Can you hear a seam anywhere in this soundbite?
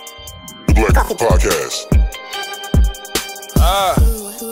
no; 0 cuts

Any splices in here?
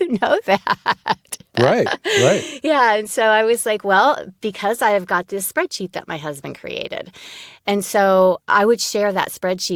no; 0 cuts

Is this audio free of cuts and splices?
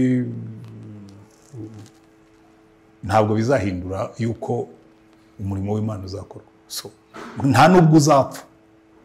yes; 0 cuts

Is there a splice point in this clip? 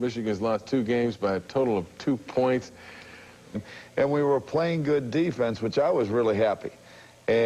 no; 0 cuts

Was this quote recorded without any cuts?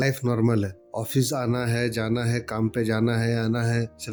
yes; 0 cuts

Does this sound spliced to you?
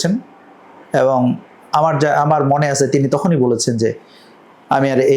no; 0 cuts

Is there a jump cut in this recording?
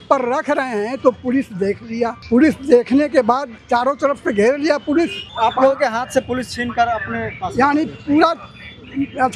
yes; 2 cuts; at 2.2 s, 5.2 s

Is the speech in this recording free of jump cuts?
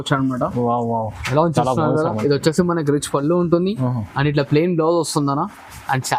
yes; 0 cuts

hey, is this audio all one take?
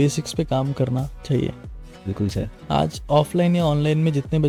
yes; 0 cuts

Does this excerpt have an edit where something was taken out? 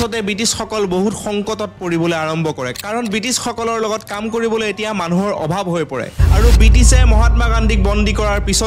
yes; 1 cut; at 6.2 s

